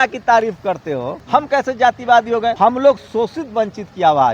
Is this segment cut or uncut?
cut